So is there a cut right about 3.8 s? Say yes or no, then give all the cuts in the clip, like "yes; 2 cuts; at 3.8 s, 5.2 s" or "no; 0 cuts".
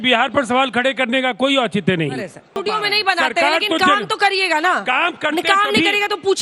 no; 1 cut; at 2.6 s